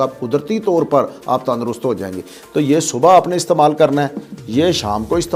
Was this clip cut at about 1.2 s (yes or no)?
no